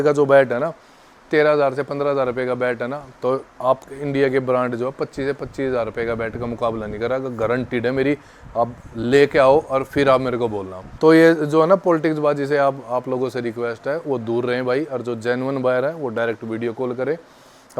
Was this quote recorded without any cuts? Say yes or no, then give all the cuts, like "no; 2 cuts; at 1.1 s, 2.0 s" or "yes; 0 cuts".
yes; 0 cuts